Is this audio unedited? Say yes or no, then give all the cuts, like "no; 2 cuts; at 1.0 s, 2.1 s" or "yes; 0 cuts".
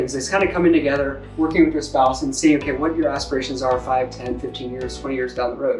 yes; 0 cuts